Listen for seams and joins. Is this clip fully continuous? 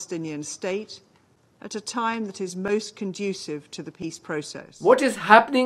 no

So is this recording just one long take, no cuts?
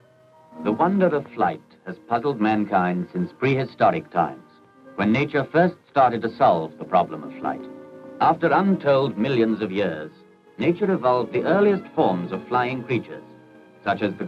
yes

